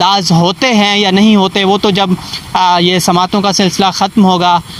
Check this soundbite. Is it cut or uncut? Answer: uncut